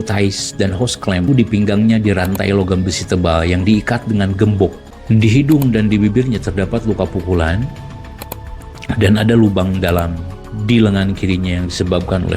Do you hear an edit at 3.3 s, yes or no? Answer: no